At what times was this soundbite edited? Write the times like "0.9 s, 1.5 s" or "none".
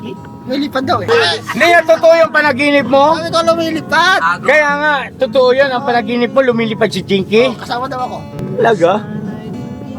1.1 s, 8.4 s